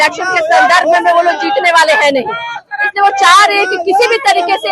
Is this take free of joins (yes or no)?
yes